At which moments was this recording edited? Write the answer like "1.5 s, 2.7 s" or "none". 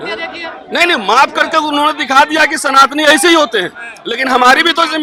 none